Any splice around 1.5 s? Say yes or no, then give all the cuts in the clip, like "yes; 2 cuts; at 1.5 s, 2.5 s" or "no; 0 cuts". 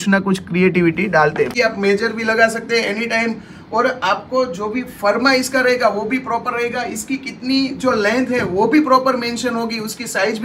yes; 1 cut; at 1.5 s